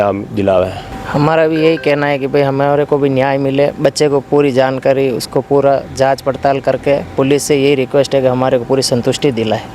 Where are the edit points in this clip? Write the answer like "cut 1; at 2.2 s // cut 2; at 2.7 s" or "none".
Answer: none